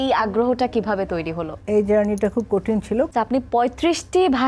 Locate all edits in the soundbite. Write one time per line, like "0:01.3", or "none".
0:01.5
0:03.1